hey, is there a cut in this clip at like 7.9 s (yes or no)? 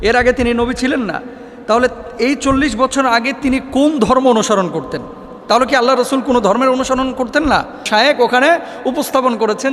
yes